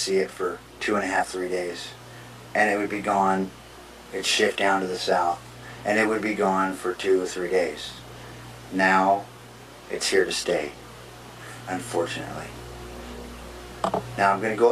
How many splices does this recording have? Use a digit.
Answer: 0